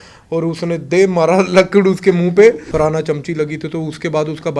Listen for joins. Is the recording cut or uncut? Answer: cut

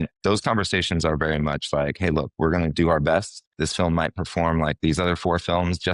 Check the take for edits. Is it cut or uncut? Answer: uncut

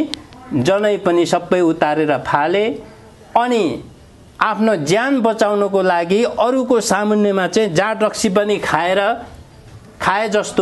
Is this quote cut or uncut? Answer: uncut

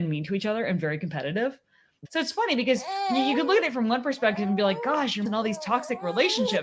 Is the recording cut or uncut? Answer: cut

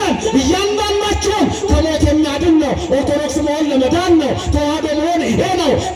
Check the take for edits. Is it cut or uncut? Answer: uncut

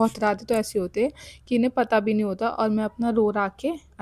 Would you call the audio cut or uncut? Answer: uncut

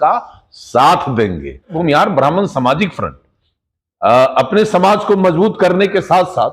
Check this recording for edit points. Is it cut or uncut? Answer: cut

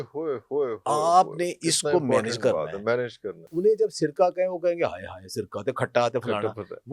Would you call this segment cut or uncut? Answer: cut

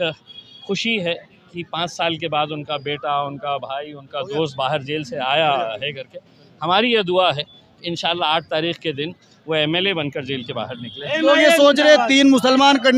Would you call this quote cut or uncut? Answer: uncut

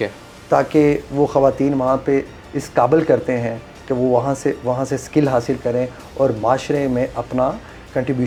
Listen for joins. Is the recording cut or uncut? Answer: uncut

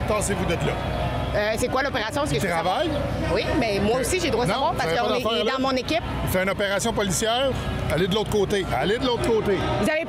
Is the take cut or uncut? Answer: uncut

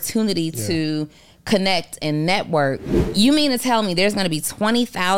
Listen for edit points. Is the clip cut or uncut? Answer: cut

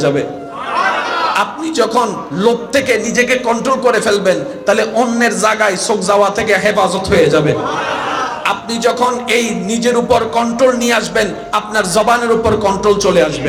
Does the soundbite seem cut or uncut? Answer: uncut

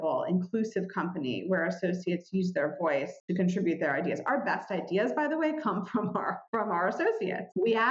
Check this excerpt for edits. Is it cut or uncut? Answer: uncut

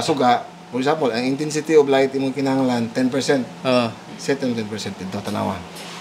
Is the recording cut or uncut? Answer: uncut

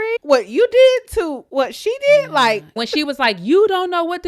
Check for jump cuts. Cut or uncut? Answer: cut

